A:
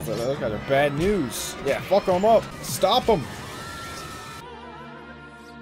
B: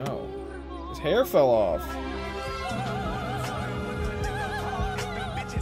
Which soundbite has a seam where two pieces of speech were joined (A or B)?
A